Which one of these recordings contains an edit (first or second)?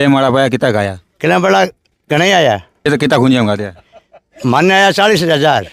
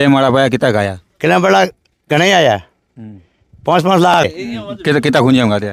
first